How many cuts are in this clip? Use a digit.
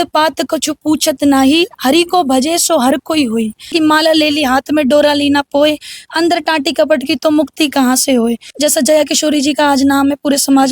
2